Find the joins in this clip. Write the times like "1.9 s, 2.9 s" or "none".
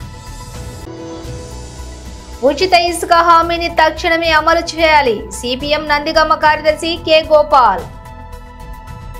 0.8 s, 7.9 s